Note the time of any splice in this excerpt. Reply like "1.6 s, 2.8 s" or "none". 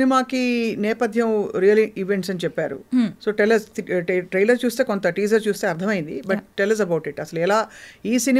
none